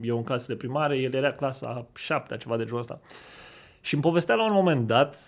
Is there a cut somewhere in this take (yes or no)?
no